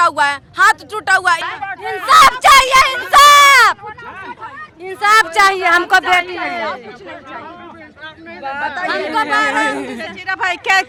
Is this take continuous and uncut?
yes; 0 cuts

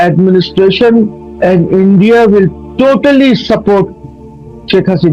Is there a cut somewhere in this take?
yes; 1 cut; at 1.2 s

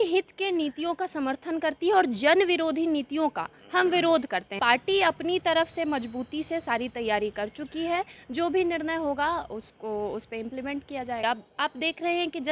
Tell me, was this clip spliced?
yes; 2 cuts; at 4.5 s, 11.2 s

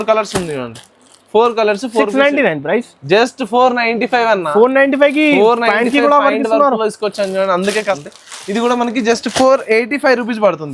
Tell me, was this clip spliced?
yes; 1 cut; at 8.0 s

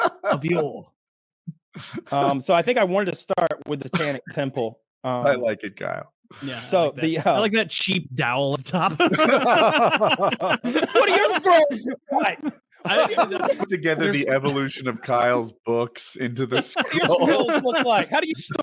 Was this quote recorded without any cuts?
yes; 0 cuts

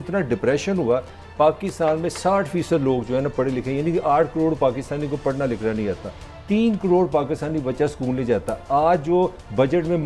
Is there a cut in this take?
no; 0 cuts

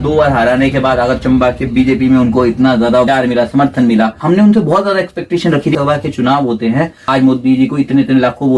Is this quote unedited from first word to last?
no; 4 cuts; at 3.1 s, 4.2 s, 5.7 s, 7.0 s

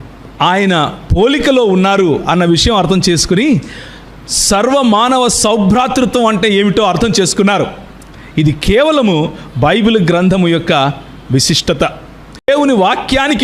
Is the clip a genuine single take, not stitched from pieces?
no; 1 cut; at 12.5 s

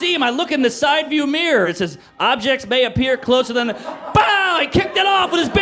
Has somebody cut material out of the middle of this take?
yes; 1 cut; at 1.7 s

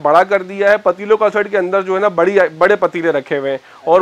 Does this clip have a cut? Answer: no; 0 cuts

